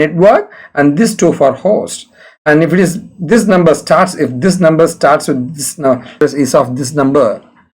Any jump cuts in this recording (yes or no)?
yes